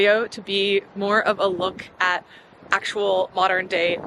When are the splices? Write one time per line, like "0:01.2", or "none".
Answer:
none